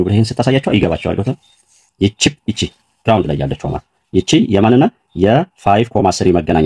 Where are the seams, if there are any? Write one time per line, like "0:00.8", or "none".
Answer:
0:01.9